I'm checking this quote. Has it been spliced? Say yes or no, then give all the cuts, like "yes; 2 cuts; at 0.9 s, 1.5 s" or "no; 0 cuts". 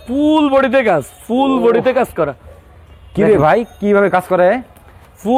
no; 0 cuts